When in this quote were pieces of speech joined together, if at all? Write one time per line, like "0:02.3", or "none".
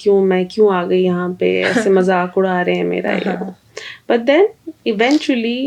none